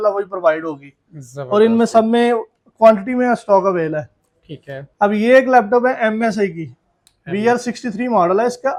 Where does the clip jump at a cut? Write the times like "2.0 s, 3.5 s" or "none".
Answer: none